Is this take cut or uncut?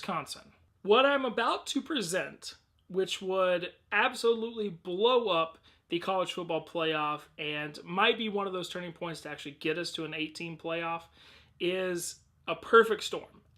uncut